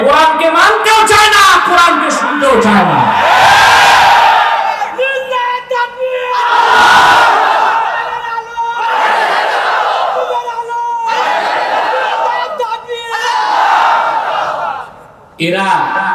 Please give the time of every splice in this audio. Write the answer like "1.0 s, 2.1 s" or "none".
none

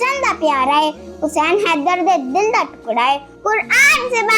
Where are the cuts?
3.3 s

